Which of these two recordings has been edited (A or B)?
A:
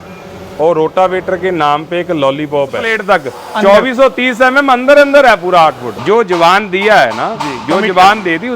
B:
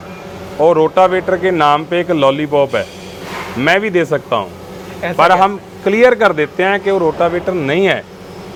A